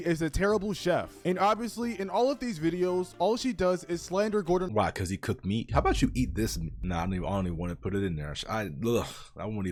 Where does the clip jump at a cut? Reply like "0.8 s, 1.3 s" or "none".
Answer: none